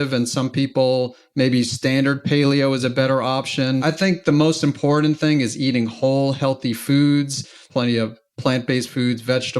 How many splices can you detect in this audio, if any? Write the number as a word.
two